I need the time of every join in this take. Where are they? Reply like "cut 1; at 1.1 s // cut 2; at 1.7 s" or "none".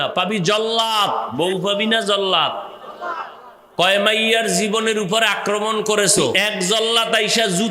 cut 1; at 1.3 s // cut 2; at 6.3 s